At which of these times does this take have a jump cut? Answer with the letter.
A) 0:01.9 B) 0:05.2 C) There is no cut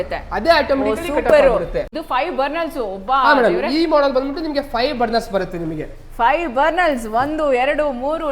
A